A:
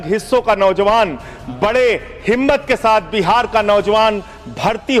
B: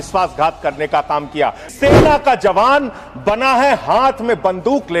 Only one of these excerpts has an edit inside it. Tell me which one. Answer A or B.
B